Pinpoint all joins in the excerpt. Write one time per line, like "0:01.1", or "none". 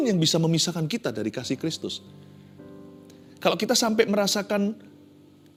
none